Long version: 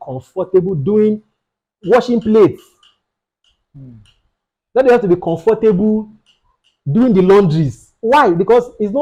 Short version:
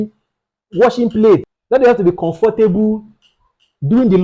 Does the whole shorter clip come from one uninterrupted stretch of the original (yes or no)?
no